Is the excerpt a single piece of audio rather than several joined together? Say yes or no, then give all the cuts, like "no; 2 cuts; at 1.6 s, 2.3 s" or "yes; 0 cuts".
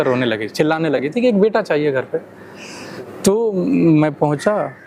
yes; 0 cuts